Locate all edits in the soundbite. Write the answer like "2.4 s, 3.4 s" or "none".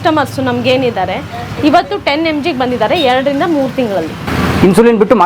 none

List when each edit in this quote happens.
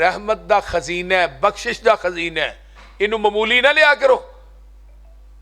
none

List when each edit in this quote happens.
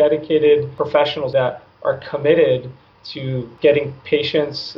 1.2 s, 3.5 s

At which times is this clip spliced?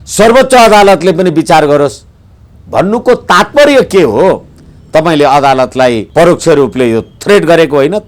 6.0 s

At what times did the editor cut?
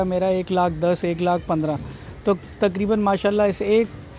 none

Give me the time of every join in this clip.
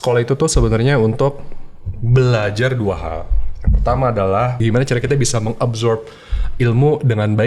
4.6 s

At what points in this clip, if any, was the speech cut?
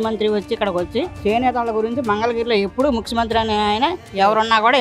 none

